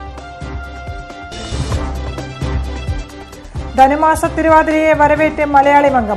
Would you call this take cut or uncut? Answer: uncut